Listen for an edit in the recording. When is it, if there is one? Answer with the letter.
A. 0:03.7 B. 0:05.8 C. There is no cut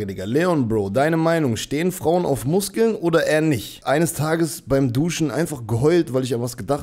A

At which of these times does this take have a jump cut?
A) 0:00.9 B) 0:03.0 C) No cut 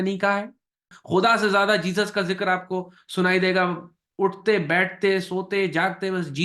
A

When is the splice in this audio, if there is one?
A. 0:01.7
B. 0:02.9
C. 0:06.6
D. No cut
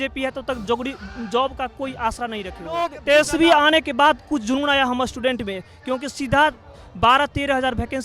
B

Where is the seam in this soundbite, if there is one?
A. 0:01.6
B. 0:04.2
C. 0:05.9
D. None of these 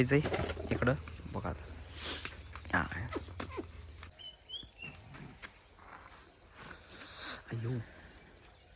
B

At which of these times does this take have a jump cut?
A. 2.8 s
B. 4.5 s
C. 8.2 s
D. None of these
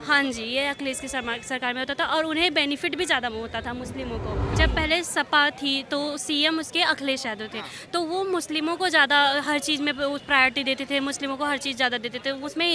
B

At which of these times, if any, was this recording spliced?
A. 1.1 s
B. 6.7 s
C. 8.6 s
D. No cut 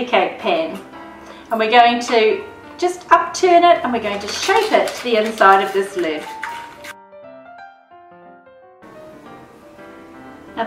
C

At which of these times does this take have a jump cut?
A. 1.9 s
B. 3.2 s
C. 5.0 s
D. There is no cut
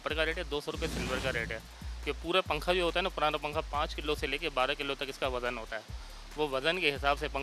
D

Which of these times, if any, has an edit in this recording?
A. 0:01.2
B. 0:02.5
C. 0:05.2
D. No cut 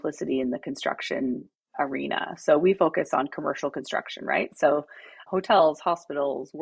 C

